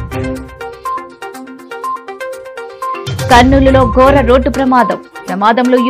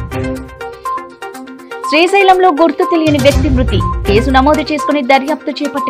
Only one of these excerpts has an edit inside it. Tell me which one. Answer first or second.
second